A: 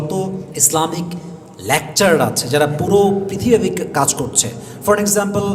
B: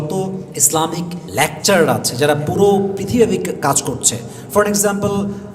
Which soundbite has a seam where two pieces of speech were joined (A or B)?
B